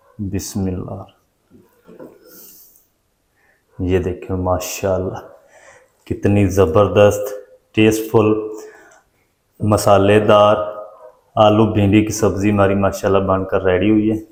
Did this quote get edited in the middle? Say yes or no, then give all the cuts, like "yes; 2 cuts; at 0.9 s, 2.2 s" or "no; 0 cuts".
no; 0 cuts